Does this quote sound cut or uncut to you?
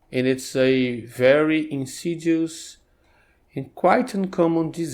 uncut